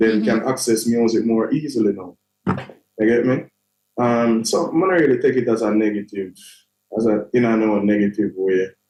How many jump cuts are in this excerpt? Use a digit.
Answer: 0